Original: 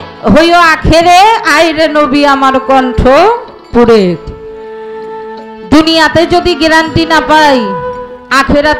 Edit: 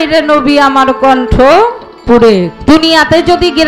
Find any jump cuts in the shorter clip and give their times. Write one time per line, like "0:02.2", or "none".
0:02.5